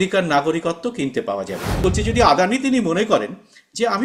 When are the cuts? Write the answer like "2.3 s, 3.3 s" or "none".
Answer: 1.8 s